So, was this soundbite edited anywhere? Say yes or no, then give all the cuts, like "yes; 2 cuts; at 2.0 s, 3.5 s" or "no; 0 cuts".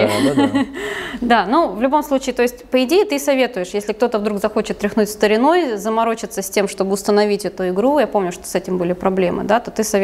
no; 0 cuts